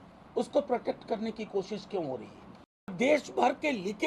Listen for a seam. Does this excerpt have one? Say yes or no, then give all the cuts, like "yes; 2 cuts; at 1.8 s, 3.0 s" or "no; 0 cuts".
yes; 1 cut; at 2.9 s